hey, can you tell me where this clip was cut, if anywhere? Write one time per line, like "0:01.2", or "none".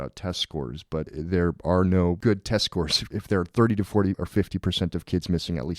0:01.1
0:02.2
0:03.0
0:04.2